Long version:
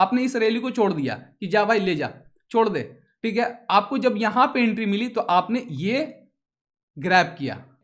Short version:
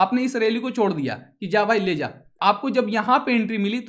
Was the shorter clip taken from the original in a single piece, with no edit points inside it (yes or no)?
no